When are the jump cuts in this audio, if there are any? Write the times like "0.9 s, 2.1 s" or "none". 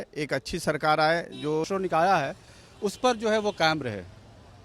1.7 s